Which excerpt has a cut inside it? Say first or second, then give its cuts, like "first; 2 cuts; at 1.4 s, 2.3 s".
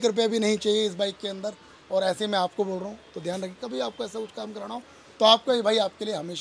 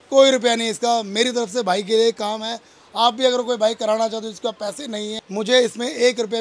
second; 1 cut; at 5.2 s